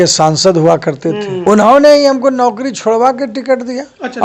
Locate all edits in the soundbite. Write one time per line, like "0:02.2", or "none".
0:01.4